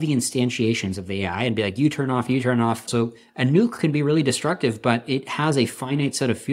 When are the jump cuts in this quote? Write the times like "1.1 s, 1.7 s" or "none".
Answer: 2.9 s